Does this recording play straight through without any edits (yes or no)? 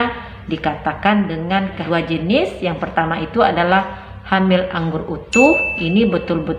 no